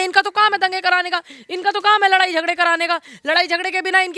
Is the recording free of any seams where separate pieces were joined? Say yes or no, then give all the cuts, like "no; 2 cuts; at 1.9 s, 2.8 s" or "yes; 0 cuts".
yes; 0 cuts